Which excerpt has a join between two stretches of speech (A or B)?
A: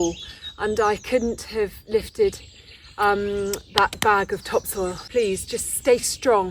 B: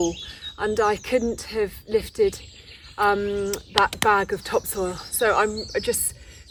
A